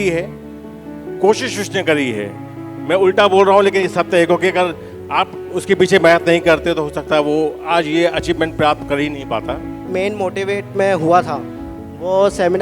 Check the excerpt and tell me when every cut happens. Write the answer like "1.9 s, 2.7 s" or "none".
9.7 s